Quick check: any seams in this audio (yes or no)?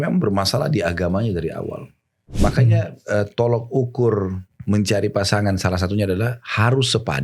yes